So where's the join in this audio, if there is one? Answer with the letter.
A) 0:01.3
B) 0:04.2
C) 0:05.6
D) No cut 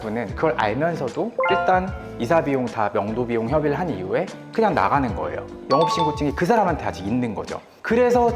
D